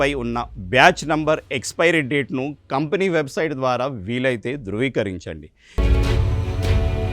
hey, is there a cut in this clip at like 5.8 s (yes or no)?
yes